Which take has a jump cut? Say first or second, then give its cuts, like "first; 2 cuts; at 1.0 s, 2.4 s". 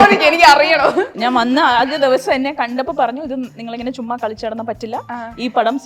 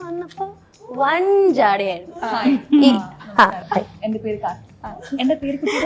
first; 1 cut; at 1.3 s